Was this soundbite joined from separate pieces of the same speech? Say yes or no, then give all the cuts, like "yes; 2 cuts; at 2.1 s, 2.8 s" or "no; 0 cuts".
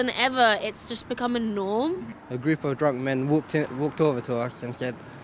yes; 1 cut; at 2.1 s